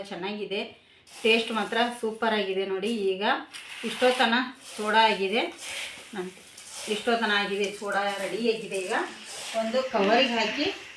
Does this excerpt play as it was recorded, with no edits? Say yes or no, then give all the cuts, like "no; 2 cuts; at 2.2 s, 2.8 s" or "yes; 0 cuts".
yes; 0 cuts